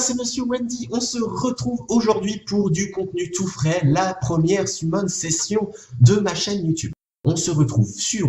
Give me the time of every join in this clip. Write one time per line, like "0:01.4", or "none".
none